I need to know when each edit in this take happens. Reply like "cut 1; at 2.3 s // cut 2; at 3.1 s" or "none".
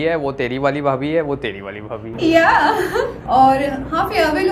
cut 1; at 3.2 s